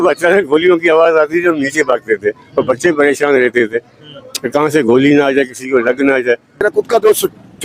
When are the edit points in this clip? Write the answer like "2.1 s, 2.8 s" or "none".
none